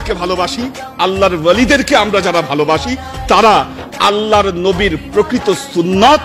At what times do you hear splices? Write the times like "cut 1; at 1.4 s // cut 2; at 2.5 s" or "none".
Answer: none